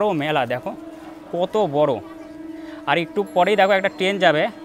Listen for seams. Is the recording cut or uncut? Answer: uncut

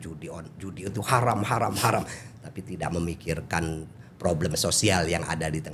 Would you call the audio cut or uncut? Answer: uncut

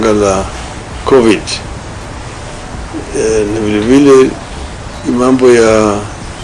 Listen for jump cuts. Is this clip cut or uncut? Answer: uncut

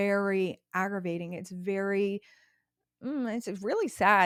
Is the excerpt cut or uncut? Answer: uncut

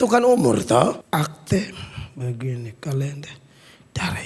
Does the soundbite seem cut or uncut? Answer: cut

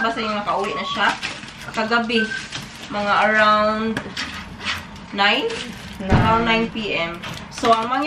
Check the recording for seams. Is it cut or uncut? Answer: uncut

